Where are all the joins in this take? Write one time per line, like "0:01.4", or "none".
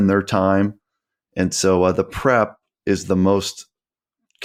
none